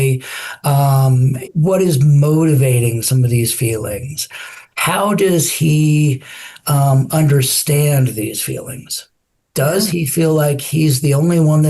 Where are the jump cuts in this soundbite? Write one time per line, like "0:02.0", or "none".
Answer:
0:01.4